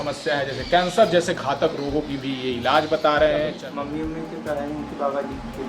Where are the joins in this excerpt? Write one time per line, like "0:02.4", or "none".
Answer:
0:03.6